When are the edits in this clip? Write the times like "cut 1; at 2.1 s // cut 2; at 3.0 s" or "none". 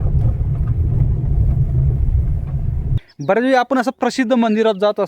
cut 1; at 3.1 s